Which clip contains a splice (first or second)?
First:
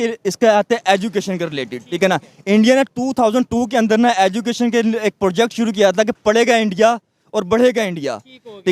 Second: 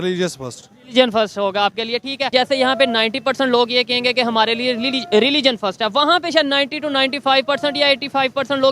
second